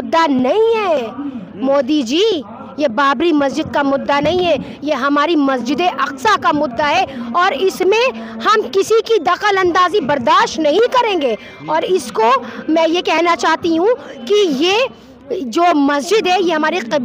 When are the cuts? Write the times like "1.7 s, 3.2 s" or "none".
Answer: none